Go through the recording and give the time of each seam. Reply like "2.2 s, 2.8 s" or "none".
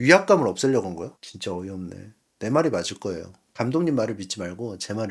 1.3 s